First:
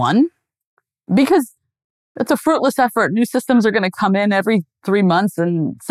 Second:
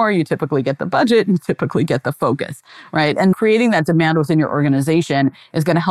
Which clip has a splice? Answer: second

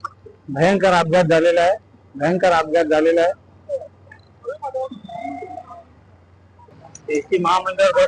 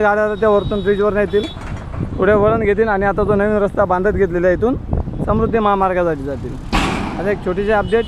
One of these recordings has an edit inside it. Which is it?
first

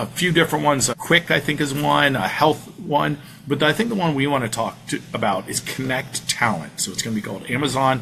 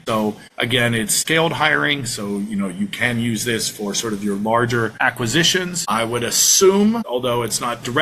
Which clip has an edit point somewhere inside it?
second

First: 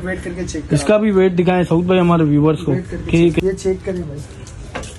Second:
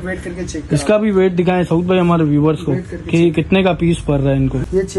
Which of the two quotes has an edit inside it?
first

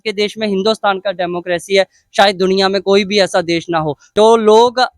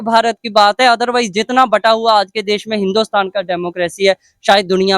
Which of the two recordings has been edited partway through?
first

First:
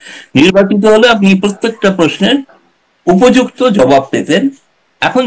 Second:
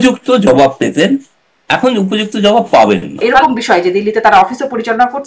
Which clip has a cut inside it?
second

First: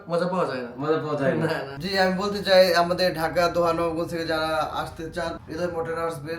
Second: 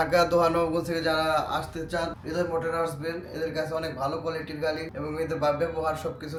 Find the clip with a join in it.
first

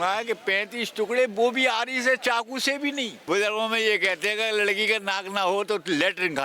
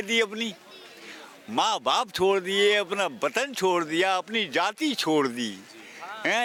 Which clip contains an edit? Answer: first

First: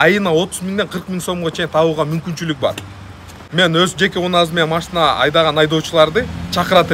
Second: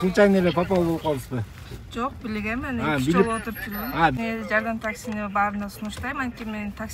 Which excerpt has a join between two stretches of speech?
second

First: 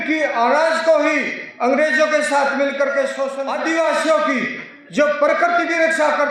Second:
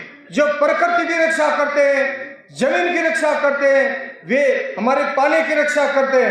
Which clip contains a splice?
first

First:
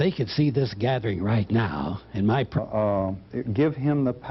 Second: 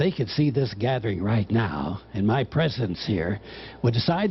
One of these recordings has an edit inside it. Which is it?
second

